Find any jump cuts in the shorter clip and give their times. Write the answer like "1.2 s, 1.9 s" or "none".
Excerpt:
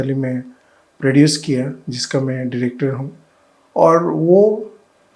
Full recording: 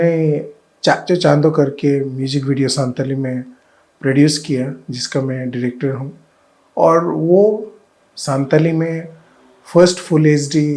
none